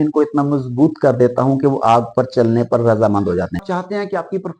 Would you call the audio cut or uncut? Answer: cut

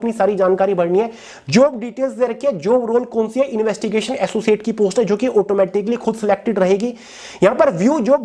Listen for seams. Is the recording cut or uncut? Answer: uncut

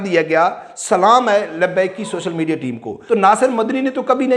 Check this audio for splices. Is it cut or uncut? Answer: cut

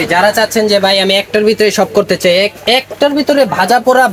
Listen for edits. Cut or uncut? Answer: uncut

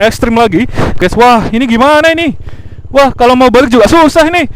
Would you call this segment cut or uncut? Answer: cut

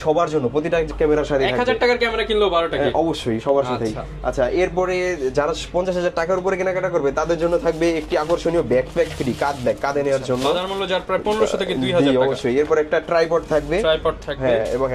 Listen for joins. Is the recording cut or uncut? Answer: uncut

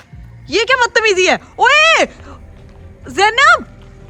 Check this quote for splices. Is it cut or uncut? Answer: uncut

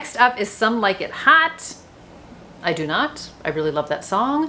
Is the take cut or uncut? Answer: uncut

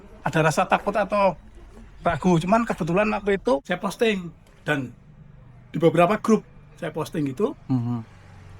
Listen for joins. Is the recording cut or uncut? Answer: cut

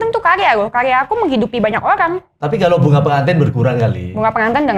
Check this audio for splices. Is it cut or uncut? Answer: cut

